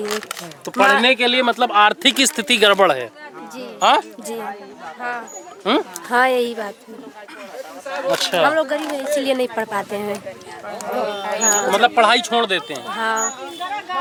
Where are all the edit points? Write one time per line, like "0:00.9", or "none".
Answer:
none